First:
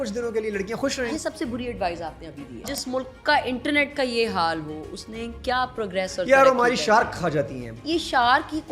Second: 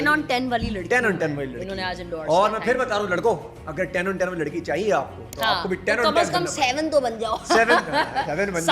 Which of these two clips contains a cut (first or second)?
first